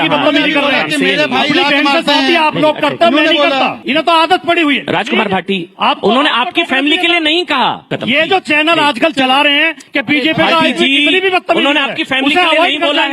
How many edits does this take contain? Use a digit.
2